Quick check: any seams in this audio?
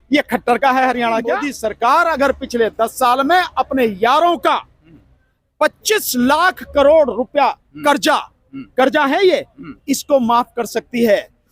yes; 1 cut; at 1.5 s

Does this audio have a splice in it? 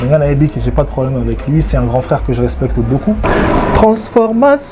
no; 0 cuts

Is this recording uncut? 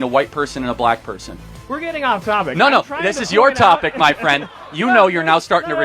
yes; 0 cuts

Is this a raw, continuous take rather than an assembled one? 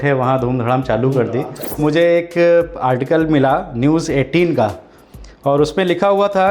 no; 1 cut; at 1.8 s

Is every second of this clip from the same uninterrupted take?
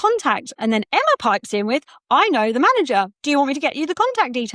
yes; 0 cuts

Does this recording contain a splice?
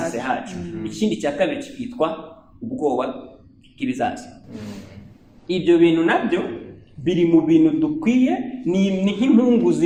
no; 0 cuts

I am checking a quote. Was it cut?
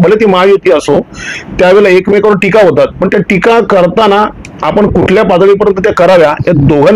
no; 0 cuts

